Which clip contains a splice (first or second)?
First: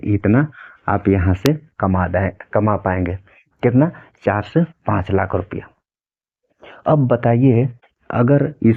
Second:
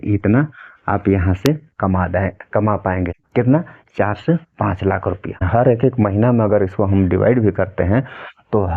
second